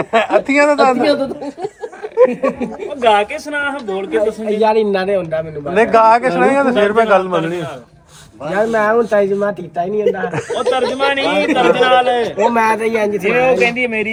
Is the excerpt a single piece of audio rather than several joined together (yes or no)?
yes